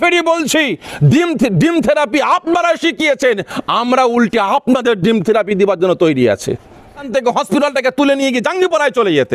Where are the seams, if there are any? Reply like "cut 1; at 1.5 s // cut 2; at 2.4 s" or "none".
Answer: cut 1; at 7.1 s